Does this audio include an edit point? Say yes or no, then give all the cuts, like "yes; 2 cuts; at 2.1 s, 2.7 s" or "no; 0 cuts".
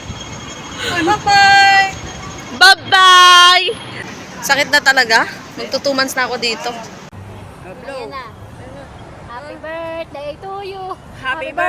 yes; 2 cuts; at 4.0 s, 7.1 s